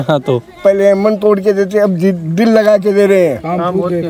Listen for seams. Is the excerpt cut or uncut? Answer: uncut